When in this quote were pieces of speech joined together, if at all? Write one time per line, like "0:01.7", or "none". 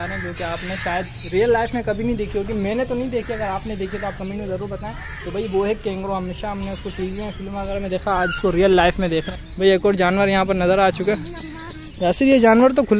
0:09.4